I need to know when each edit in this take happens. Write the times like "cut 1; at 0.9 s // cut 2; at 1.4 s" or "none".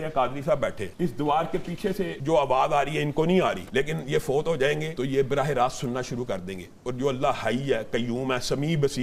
cut 1; at 0.8 s // cut 2; at 2.2 s // cut 3; at 3.6 s // cut 4; at 4.9 s